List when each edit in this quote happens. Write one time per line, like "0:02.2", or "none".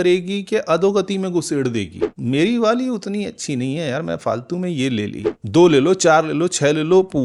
0:02.1
0:05.4